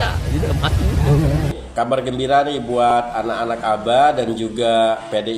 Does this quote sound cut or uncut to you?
cut